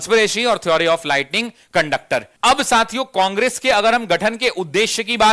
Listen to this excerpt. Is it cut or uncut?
uncut